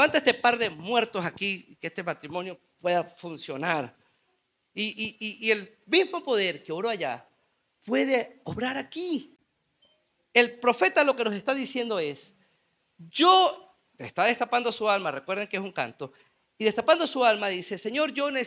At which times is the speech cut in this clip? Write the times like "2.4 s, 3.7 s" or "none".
none

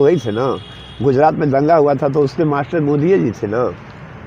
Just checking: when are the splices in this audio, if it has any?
none

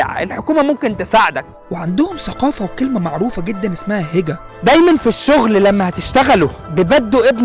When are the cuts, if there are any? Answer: 1.5 s, 4.4 s

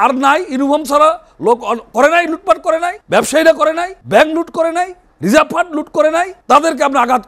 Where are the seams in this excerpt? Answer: 3.0 s, 3.9 s, 5.0 s, 6.4 s

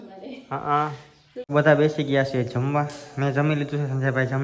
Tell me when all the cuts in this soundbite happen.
1.3 s

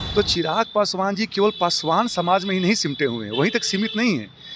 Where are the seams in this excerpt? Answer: none

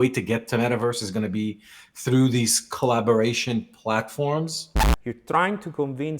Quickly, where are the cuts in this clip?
4.9 s

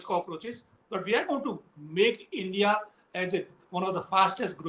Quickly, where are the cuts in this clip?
none

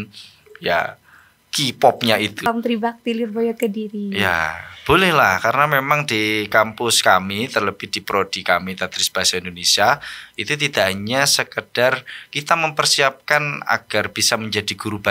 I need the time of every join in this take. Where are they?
2.5 s

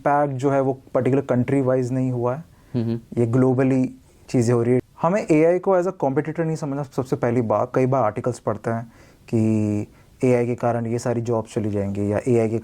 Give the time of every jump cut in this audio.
4.8 s, 7.7 s

